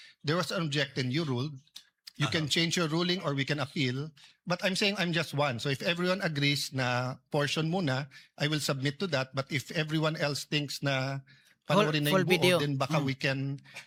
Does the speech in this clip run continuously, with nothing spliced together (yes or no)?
yes